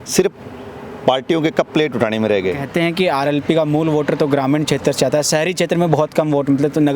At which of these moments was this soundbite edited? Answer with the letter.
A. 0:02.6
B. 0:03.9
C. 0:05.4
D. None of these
A